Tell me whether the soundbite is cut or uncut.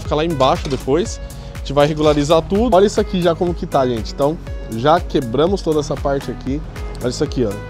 cut